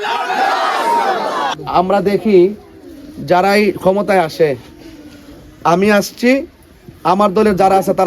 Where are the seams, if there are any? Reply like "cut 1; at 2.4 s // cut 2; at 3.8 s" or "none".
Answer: cut 1; at 1.6 s